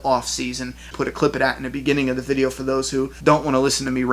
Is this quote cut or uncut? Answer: cut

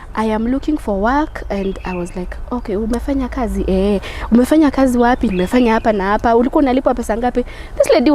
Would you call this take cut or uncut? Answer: uncut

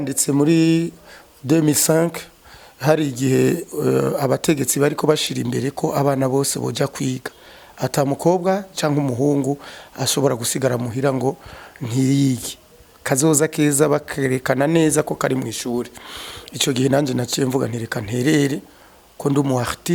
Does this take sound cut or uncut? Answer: uncut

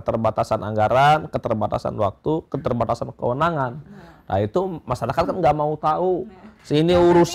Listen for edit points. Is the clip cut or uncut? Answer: uncut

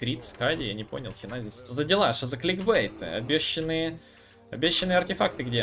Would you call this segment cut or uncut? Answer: cut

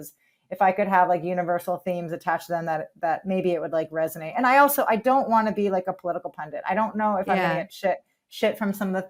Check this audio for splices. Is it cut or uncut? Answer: uncut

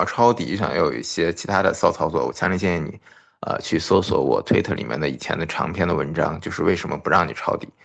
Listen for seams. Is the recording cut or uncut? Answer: uncut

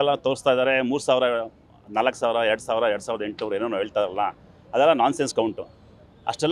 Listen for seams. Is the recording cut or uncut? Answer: uncut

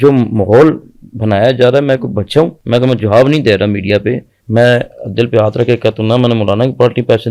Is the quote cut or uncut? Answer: cut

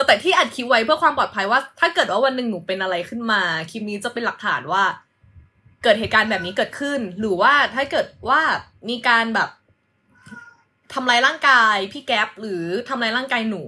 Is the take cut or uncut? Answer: uncut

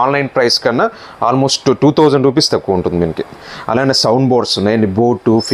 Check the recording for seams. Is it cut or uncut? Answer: uncut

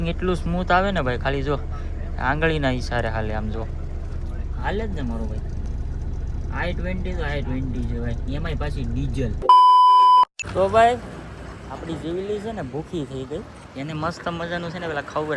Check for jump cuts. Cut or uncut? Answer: uncut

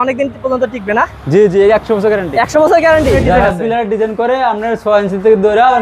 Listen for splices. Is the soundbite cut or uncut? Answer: cut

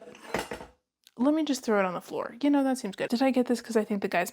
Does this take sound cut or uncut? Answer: cut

